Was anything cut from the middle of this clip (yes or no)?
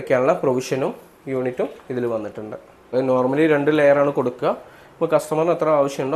yes